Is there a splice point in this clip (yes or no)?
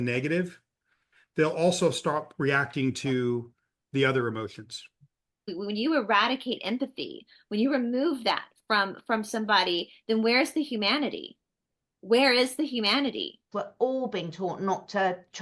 yes